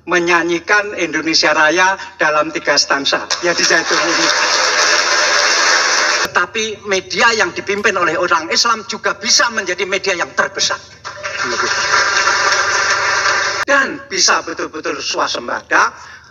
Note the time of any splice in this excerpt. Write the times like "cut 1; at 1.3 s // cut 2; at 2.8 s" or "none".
cut 1; at 6.3 s // cut 2; at 13.6 s